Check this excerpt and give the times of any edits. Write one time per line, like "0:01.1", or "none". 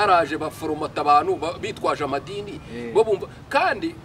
none